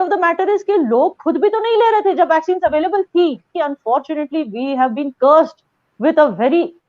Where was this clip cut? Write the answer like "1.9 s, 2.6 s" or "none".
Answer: 3.5 s